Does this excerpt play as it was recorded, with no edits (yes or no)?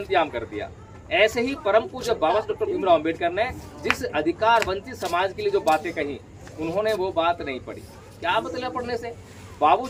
yes